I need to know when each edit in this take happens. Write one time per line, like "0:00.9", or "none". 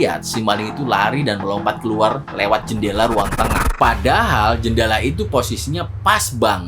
0:03.7